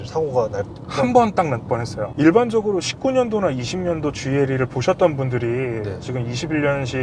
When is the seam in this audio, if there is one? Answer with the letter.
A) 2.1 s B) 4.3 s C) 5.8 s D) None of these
A